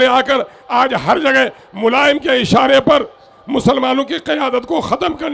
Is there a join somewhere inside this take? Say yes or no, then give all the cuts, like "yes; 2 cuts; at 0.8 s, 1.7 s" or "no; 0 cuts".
no; 0 cuts